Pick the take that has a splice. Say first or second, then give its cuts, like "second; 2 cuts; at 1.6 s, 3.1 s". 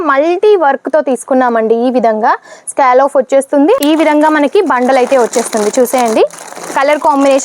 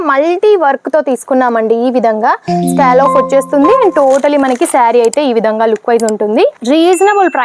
first; 1 cut; at 3.8 s